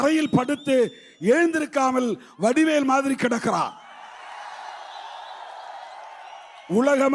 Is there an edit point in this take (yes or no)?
no